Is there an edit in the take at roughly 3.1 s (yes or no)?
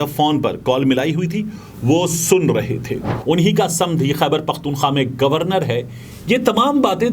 yes